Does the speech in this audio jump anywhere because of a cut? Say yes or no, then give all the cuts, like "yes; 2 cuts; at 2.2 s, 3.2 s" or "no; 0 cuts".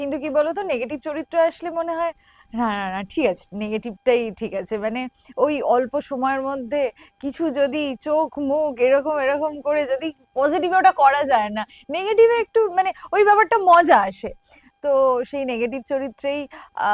no; 0 cuts